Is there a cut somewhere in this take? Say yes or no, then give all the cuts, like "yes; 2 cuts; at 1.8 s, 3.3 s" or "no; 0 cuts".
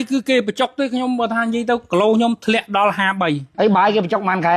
yes; 1 cut; at 3.5 s